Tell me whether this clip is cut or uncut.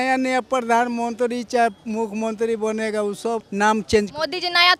uncut